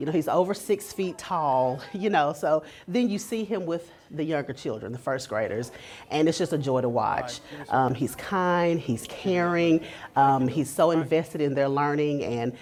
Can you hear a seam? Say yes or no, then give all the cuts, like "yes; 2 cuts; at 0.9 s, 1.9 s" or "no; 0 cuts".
no; 0 cuts